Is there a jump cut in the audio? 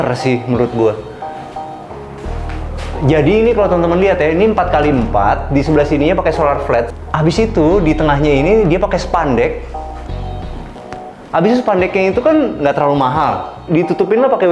yes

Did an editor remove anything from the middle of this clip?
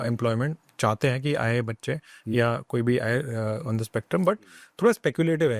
no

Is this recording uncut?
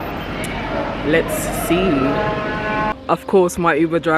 no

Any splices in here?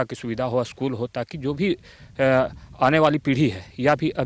no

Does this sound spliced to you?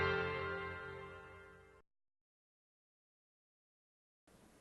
yes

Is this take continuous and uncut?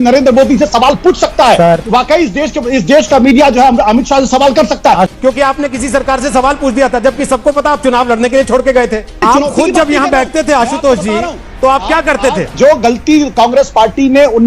no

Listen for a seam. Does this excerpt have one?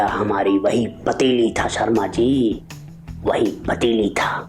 no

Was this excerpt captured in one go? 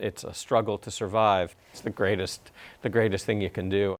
yes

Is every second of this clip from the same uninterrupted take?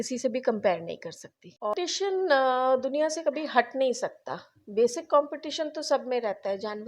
no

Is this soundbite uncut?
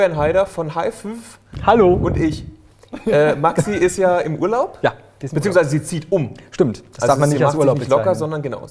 yes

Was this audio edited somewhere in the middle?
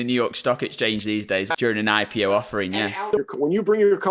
yes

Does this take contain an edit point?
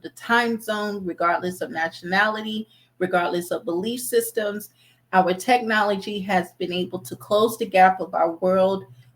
no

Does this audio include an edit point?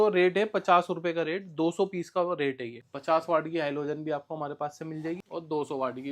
yes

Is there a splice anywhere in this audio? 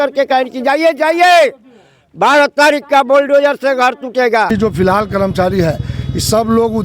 yes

